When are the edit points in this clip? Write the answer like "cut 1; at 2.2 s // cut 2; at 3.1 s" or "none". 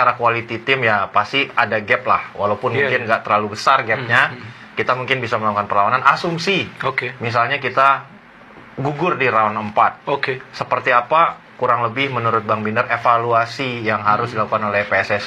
none